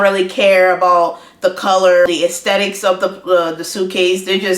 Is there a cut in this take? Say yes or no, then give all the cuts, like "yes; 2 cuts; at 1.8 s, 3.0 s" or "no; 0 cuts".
yes; 1 cut; at 2.1 s